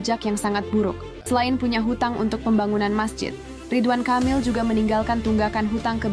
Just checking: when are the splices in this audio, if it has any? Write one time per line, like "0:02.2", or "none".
0:01.1